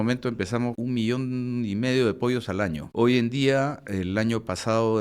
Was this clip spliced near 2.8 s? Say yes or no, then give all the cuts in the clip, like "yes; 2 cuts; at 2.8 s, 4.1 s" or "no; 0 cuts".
yes; 2 cuts; at 0.8 s, 2.8 s